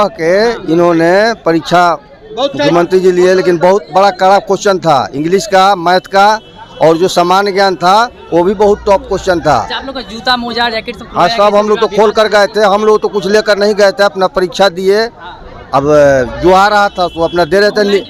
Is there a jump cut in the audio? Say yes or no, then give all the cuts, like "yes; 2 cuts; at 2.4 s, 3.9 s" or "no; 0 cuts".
no; 0 cuts